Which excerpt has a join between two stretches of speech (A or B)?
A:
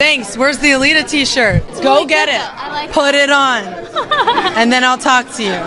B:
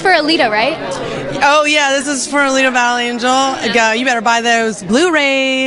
A